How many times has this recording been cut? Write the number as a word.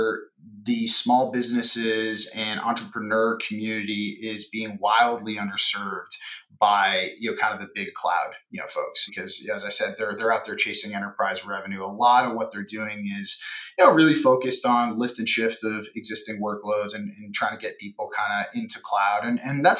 one